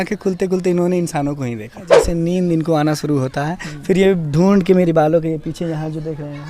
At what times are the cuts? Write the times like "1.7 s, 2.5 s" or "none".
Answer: 1.9 s